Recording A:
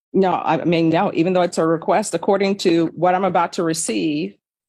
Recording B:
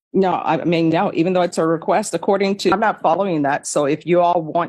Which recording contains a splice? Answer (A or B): B